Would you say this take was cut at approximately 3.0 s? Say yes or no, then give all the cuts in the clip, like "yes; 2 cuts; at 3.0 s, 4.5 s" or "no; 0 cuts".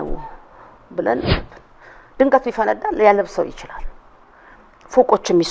no; 1 cut; at 1.4 s